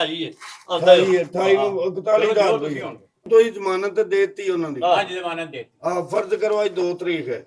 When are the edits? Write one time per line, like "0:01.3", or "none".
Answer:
0:03.3